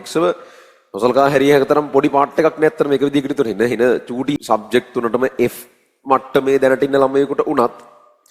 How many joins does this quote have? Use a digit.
1